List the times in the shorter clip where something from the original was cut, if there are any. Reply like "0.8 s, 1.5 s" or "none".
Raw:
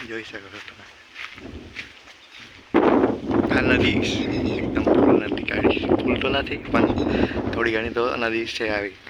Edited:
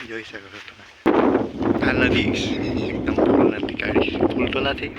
1.1 s

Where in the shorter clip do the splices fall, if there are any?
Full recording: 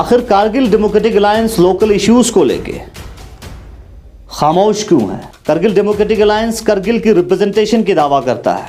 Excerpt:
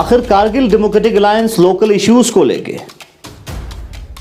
none

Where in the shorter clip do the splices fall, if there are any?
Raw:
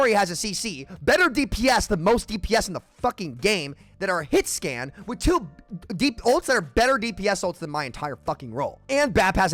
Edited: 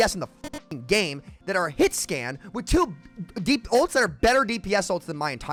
none

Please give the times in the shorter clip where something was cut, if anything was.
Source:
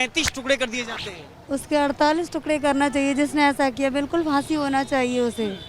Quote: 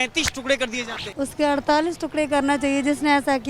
1.0 s

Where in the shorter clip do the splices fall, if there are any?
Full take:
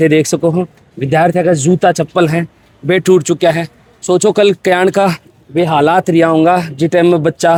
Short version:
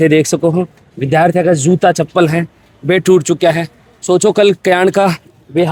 none

